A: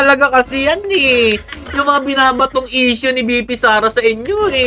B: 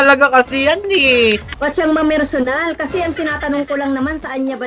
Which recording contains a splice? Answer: B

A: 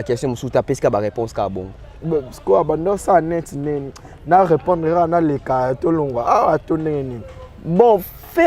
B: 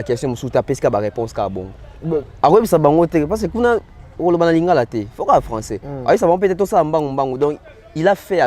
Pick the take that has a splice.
B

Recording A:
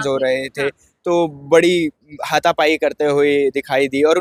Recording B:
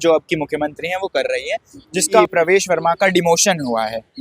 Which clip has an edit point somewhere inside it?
B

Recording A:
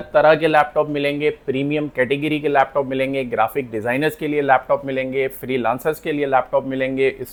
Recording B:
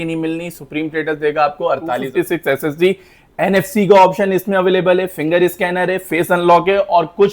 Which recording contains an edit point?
B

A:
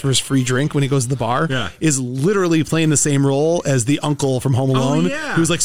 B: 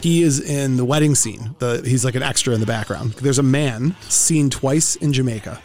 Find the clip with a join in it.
B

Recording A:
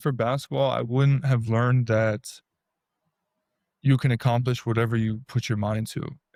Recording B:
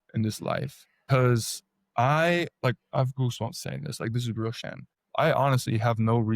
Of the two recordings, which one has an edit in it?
B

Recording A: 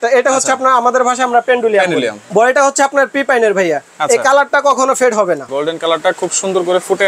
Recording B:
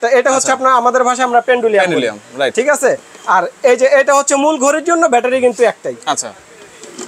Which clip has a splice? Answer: A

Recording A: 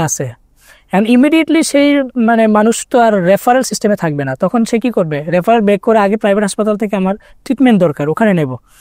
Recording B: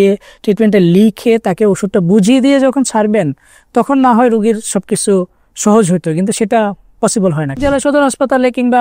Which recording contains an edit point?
B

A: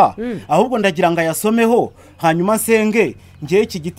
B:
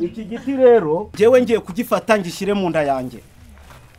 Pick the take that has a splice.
B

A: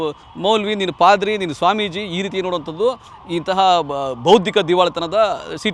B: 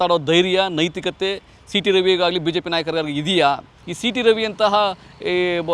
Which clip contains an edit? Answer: B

